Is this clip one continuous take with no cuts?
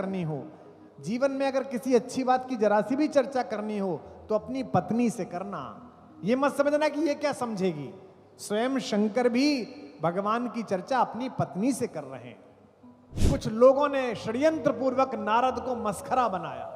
no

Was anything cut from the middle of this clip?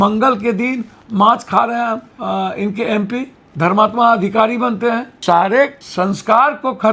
yes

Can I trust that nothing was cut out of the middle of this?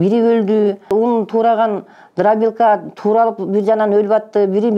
no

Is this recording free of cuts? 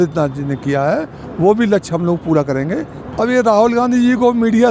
no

